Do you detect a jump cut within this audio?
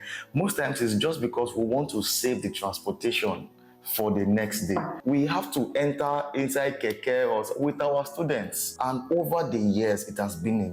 yes; 2 cuts; at 4.9 s, 8.7 s

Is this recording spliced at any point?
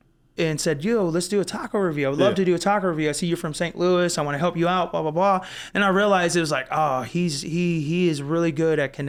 no; 0 cuts

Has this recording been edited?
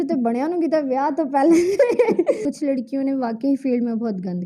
yes; 1 cut; at 2.4 s

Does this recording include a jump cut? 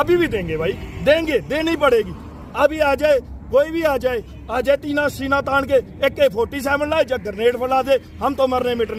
no; 0 cuts

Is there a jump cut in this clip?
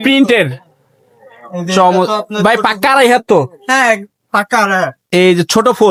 no; 0 cuts

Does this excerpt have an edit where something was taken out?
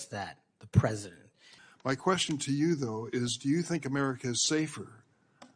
yes; 1 cut; at 1.5 s

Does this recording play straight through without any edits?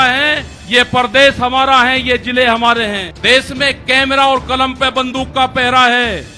no; 1 cut; at 3.1 s

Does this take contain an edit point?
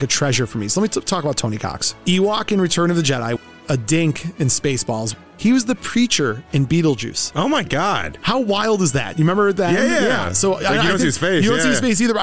yes; 2 cuts; at 3.4 s, 5.1 s

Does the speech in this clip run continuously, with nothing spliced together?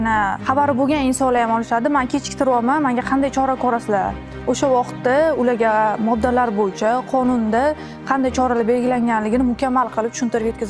yes; 0 cuts

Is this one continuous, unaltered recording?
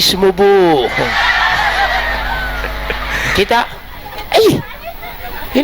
no; 1 cut; at 3.1 s

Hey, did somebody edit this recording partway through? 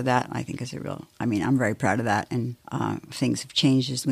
yes; 1 cut; at 2.6 s

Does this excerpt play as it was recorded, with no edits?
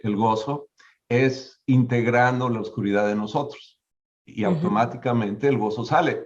yes; 0 cuts

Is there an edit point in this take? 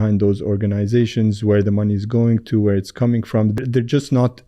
yes; 1 cut; at 3.6 s

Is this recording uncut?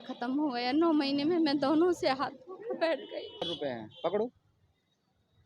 no; 1 cut; at 3.4 s

